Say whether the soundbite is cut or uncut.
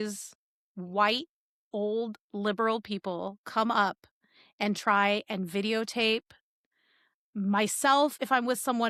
uncut